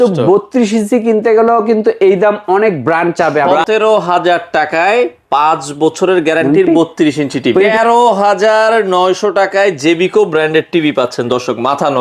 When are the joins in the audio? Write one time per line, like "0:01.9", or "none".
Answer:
0:03.6
0:07.7